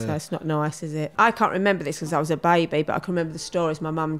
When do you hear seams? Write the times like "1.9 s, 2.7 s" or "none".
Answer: 1.1 s